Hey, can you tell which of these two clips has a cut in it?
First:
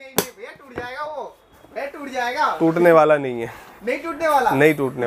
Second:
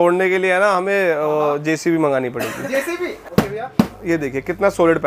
second; 1 cut; at 3.2 s

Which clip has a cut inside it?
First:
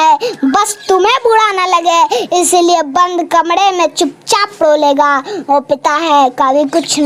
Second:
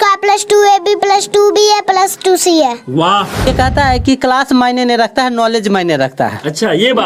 second; 1 cut; at 3.5 s

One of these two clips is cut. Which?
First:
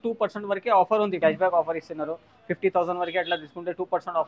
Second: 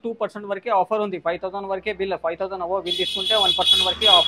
first; 1 cut; at 1.1 s

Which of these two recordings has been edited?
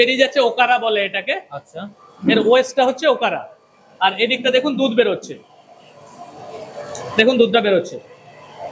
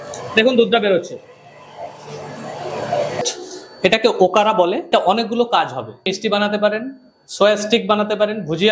second; 3 cuts; at 3.2 s, 4.9 s, 6.1 s

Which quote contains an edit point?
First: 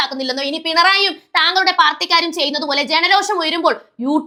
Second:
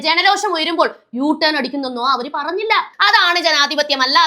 second; 1 cut; at 2.9 s

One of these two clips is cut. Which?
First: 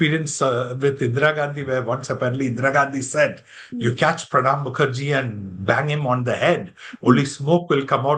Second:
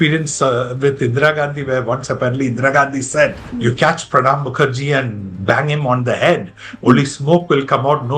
second; 1 cut; at 3.5 s

